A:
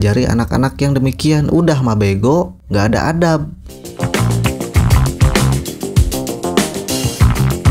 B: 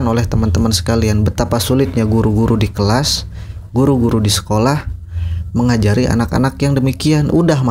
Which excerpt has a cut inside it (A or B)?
A